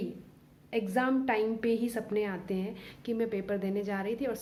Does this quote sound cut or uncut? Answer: uncut